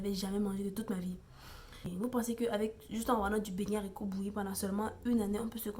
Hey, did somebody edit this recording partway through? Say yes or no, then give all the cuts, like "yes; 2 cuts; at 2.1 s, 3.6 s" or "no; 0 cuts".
yes; 1 cut; at 1.9 s